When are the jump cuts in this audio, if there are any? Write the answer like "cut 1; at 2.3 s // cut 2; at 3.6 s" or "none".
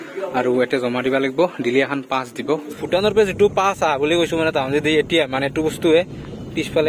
cut 1; at 2.7 s